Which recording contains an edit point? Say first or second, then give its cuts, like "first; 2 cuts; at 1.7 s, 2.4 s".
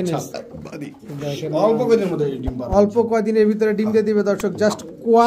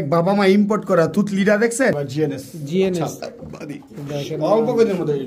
second; 1 cut; at 1.9 s